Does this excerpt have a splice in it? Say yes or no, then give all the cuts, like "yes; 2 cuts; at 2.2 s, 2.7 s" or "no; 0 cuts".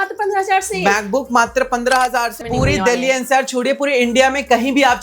yes; 1 cut; at 2.4 s